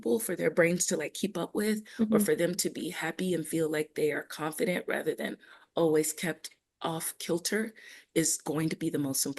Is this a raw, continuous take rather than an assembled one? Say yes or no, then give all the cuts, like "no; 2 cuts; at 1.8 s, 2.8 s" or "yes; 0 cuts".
yes; 0 cuts